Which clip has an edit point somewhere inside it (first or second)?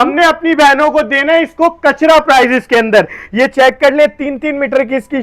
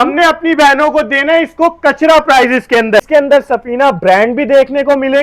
second